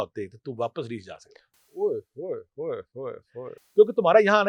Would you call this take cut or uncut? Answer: uncut